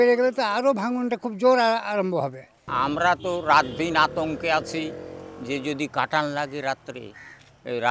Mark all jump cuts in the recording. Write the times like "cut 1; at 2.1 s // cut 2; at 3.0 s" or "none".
cut 1; at 2.7 s